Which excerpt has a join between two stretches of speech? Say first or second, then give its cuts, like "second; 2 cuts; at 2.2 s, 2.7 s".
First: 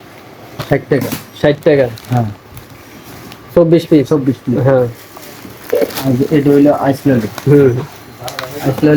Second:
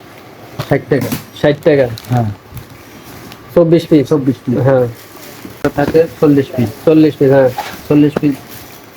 second; 1 cut; at 5.7 s